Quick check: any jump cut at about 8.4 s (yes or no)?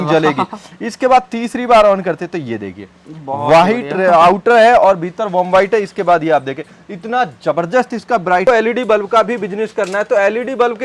yes